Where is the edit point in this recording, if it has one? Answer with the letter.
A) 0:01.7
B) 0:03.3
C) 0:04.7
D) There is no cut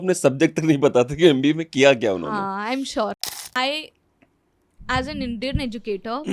B